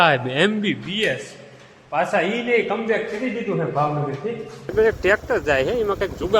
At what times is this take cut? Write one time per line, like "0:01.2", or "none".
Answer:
0:04.7

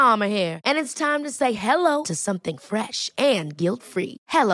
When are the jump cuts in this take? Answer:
none

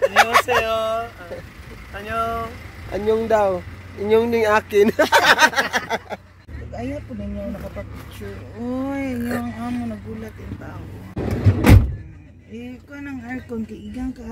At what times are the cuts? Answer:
0:06.6
0:11.2

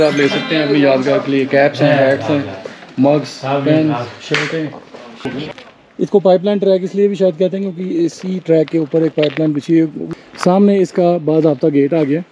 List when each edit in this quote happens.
0:05.2
0:10.0

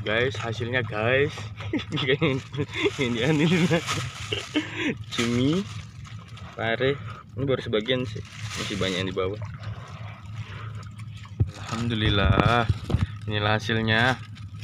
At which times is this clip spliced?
0:11.5

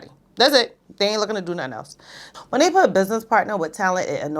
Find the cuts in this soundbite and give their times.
0:02.2

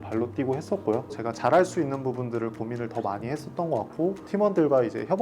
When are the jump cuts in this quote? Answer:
0:01.1
0:04.2

